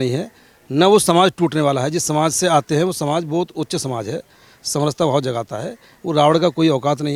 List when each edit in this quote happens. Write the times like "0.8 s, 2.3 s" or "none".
none